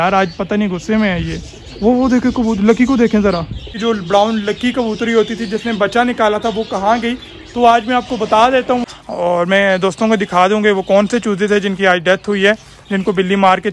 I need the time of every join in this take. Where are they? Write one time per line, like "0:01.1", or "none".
0:03.7
0:08.9